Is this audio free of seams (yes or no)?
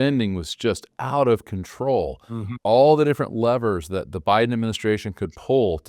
yes